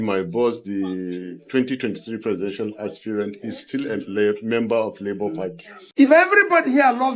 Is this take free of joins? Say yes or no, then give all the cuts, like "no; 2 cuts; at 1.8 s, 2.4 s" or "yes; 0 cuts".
no; 1 cut; at 5.8 s